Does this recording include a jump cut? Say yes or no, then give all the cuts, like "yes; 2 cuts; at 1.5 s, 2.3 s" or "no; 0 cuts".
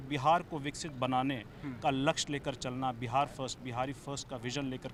no; 0 cuts